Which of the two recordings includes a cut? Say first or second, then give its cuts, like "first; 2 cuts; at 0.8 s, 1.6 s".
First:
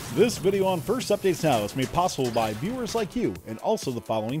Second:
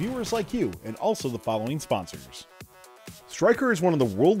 second; 1 cut; at 2.7 s